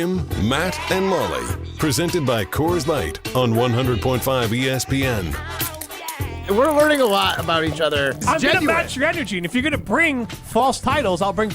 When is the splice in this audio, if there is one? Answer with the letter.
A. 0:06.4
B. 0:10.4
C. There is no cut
A